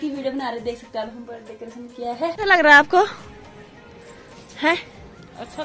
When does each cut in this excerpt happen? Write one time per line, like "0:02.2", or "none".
0:01.9